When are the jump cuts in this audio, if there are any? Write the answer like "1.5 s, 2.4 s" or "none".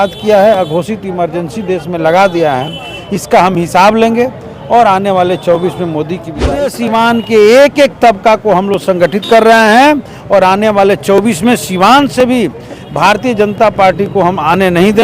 6.7 s